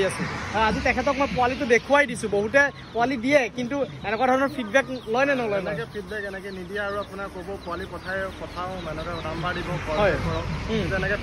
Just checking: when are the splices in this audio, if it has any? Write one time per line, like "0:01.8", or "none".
none